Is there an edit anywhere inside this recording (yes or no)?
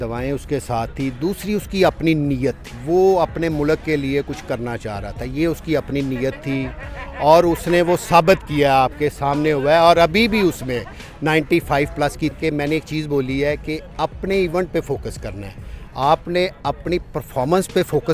yes